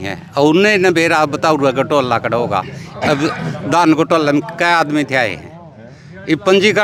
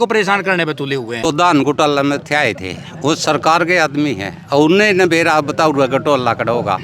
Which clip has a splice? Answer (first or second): second